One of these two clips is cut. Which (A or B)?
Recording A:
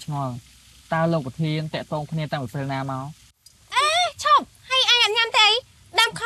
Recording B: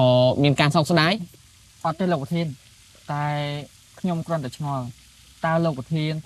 A